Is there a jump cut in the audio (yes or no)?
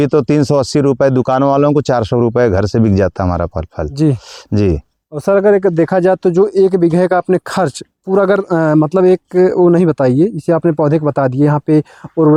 no